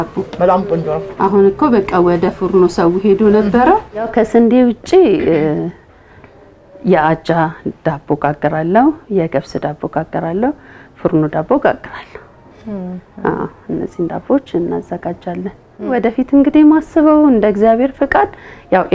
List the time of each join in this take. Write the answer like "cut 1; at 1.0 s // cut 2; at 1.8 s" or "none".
cut 1; at 4.1 s // cut 2; at 15.9 s